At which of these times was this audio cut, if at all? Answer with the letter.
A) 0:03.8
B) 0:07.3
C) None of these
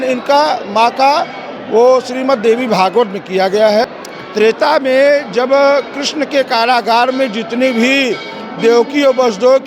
A